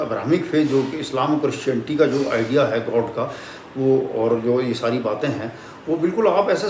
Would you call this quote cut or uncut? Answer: uncut